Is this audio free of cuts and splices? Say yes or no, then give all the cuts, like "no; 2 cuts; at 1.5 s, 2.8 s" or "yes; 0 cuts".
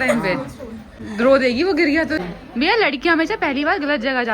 no; 1 cut; at 2.2 s